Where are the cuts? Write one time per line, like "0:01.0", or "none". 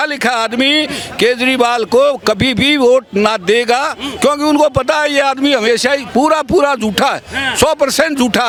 none